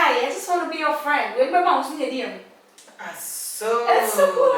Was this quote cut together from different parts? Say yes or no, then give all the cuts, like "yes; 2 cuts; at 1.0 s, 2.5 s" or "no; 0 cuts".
no; 0 cuts